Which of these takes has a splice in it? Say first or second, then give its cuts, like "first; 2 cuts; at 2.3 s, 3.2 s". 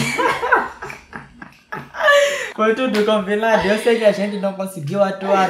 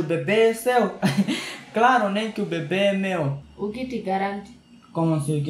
first; 1 cut; at 2.4 s